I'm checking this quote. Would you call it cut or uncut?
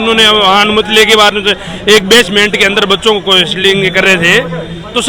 uncut